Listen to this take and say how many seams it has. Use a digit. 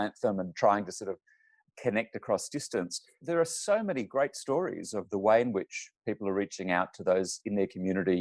2